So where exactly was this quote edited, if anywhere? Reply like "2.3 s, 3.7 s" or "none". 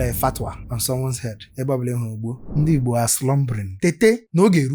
2.4 s, 3.7 s